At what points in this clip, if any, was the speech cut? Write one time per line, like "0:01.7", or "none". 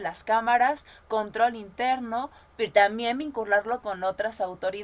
none

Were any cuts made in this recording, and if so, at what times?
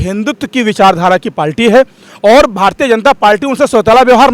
none

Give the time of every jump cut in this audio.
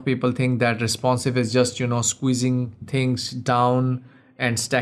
none

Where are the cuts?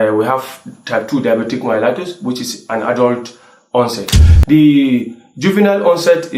0:04.2

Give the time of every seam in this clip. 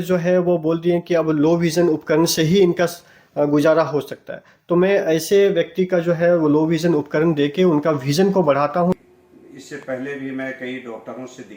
0:09.0

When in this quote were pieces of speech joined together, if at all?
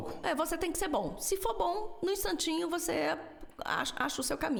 none

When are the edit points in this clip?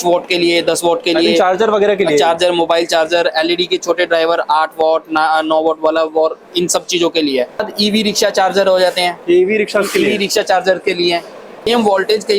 0:07.6
0:11.7

